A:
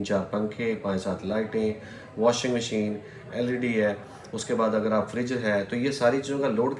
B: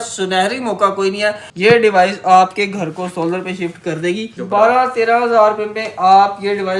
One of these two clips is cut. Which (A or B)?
B